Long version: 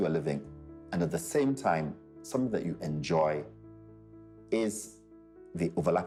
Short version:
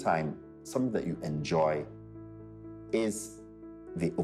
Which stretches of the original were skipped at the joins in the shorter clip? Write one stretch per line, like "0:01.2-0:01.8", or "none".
none